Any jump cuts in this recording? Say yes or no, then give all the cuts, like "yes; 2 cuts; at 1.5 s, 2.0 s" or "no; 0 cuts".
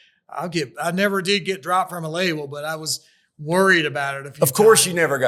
no; 0 cuts